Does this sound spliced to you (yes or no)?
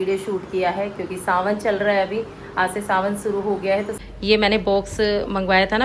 yes